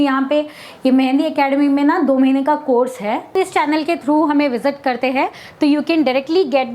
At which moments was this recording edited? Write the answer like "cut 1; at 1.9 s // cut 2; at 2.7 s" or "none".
cut 1; at 3.3 s